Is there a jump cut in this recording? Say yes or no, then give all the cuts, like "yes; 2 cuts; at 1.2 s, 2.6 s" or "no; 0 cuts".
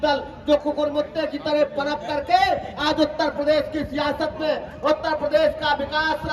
no; 0 cuts